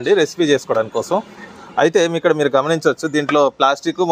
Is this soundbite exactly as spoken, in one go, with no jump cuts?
yes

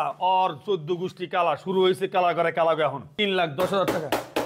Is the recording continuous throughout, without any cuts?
no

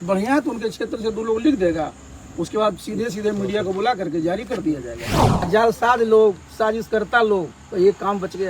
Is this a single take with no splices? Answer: no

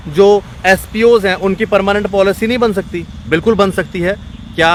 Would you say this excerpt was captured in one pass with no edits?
yes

